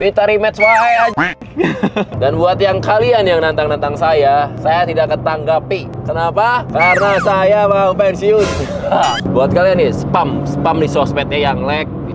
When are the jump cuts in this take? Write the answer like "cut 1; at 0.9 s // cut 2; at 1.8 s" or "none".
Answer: cut 1; at 2.2 s // cut 2; at 9.2 s